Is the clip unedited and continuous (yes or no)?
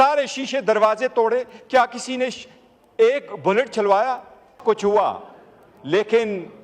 no